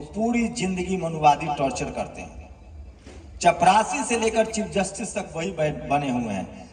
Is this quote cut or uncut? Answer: uncut